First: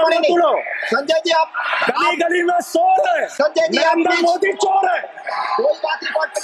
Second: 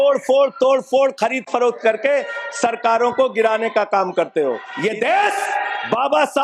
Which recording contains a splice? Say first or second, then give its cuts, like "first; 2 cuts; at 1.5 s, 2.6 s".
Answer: second; 1 cut; at 4.7 s